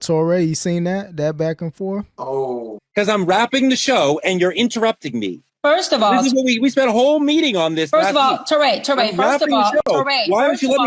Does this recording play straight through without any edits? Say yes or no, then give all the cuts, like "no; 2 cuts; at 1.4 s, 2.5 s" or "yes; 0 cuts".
no; 1 cut; at 2.7 s